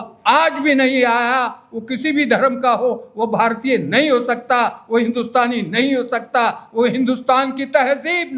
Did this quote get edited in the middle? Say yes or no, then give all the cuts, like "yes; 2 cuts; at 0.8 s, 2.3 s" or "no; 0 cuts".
no; 0 cuts